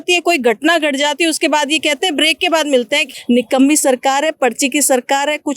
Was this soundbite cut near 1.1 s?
no; 1 cut; at 3.1 s

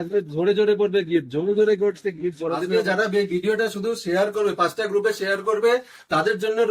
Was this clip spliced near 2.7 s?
yes; 1 cut; at 2.7 s

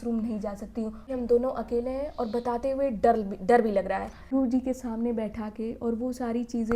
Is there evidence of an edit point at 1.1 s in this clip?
yes; 2 cuts; at 1.1 s, 4.4 s

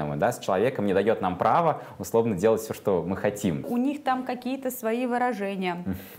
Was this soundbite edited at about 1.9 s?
no; 1 cut; at 3.7 s

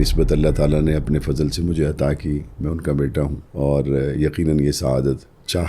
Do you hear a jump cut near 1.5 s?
no; 1 cut; at 3.4 s

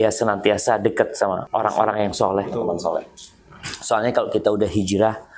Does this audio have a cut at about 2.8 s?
no; 1 cut; at 1.4 s

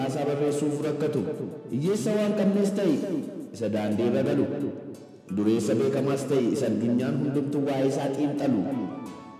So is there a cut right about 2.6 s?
yes; 1 cut; at 2.6 s

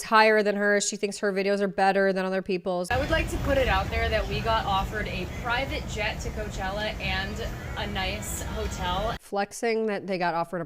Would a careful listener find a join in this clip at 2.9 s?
yes; 2 cuts; at 2.9 s, 9.2 s

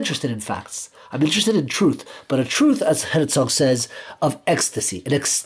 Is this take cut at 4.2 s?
no; 0 cuts

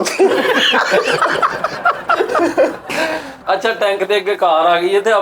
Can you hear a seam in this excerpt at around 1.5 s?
no; 1 cut; at 3.3 s

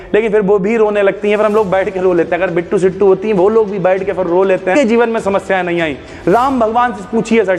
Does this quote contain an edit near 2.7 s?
no; 1 cut; at 4.7 s

